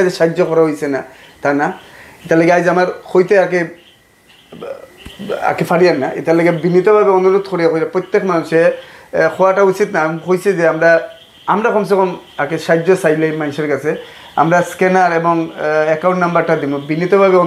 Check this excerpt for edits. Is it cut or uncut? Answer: uncut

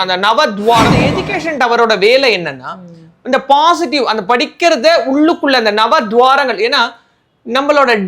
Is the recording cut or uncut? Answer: cut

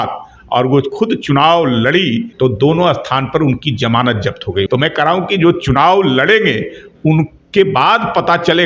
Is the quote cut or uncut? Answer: cut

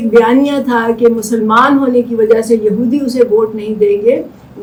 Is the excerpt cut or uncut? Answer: uncut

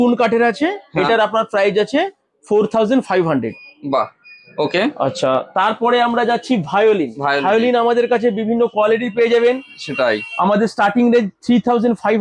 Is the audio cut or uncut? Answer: uncut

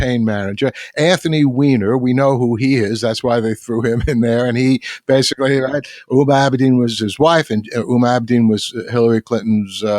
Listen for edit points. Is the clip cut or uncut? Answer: cut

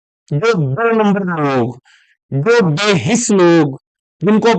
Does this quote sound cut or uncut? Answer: uncut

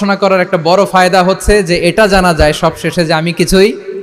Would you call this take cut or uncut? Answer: uncut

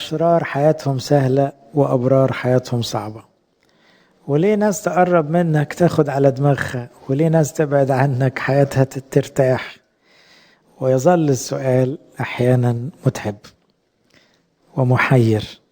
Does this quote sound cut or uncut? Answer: uncut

